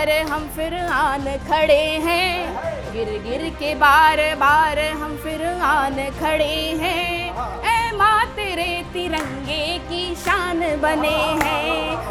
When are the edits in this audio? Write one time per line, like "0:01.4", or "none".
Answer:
none